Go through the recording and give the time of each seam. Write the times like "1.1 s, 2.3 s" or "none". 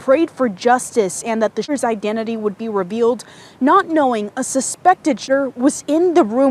1.7 s